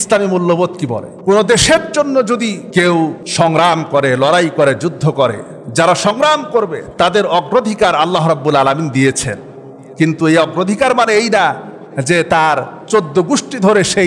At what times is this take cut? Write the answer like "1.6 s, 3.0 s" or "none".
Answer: 1.1 s, 2.6 s, 3.2 s